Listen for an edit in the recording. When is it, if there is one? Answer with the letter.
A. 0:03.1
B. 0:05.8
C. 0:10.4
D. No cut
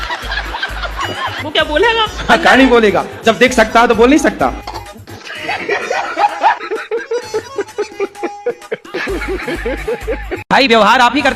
D